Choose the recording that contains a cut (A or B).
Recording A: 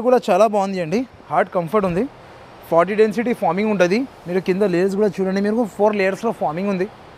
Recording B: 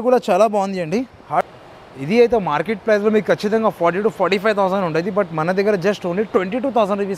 B